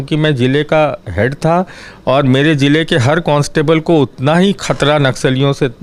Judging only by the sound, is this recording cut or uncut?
uncut